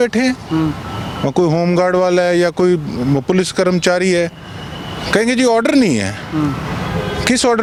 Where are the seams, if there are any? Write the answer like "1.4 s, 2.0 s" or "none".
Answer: none